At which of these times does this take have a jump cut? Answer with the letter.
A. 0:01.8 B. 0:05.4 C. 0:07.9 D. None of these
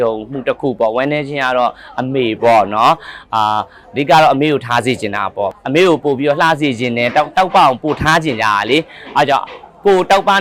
B